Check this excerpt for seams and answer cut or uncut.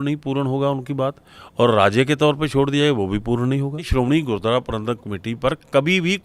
cut